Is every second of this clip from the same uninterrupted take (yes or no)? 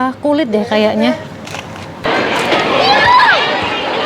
no